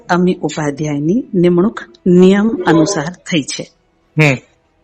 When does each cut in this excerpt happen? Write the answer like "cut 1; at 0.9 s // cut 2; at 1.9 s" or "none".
none